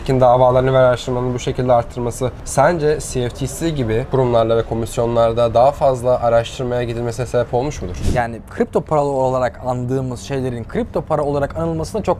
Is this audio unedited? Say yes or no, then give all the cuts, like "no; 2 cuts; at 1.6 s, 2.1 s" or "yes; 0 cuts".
no; 3 cuts; at 2.3 s, 4.1 s, 8.0 s